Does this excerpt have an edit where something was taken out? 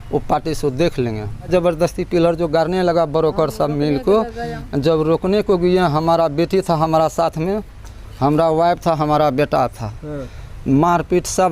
yes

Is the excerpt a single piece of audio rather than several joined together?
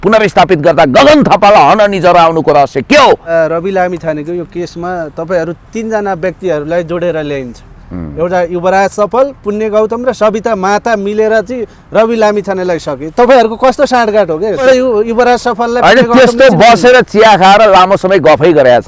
no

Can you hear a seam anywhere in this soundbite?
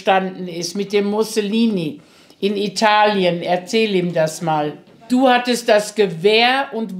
yes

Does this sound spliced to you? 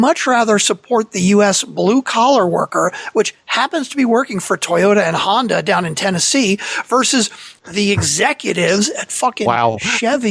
yes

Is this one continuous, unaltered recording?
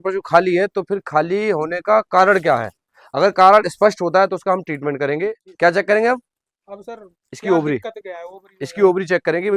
no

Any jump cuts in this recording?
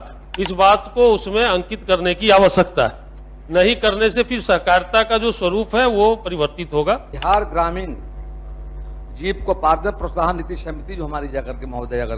yes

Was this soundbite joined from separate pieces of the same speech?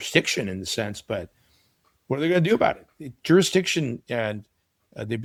no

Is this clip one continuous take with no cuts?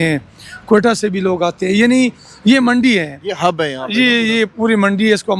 yes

